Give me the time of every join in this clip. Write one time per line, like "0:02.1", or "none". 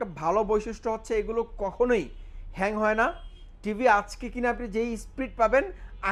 none